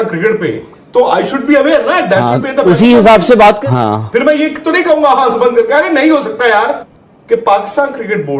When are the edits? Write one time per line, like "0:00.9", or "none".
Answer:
0:03.6
0:06.9